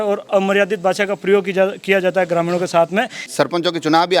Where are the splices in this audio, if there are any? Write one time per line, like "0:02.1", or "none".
0:03.2